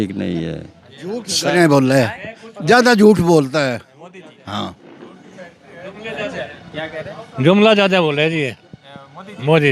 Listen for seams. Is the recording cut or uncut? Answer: uncut